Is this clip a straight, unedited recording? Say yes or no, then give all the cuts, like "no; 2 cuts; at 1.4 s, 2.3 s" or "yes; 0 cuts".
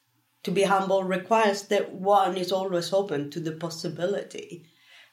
yes; 0 cuts